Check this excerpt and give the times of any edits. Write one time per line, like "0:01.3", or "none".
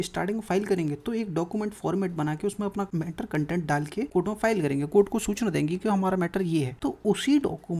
0:02.9
0:04.1
0:06.7